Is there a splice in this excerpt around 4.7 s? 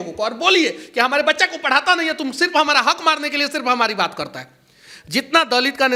no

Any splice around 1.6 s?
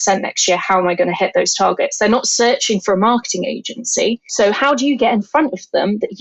no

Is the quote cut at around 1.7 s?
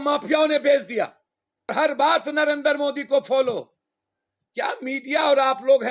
yes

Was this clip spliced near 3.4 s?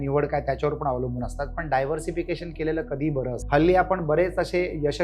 yes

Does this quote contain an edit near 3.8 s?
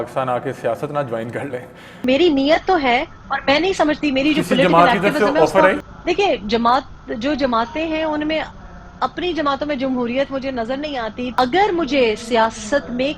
no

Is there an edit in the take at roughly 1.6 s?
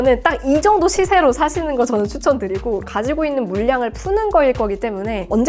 no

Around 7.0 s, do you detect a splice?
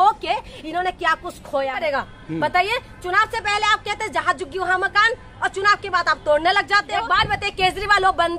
yes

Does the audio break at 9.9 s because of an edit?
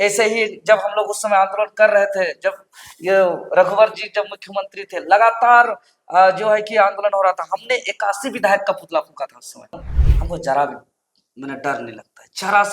yes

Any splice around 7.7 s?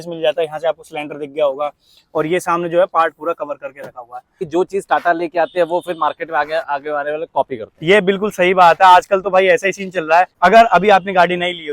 no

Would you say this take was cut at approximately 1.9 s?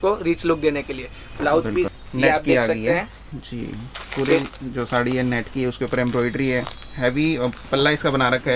yes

